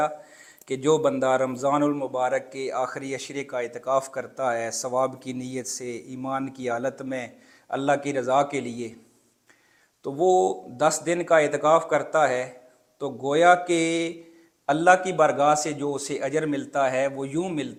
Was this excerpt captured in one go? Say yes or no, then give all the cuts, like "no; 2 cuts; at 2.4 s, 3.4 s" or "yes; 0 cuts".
yes; 0 cuts